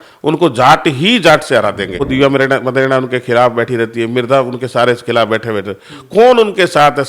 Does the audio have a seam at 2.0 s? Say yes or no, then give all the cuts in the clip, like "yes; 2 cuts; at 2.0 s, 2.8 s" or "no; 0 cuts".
yes; 1 cut; at 2.0 s